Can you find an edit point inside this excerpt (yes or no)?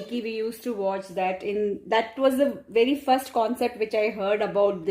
no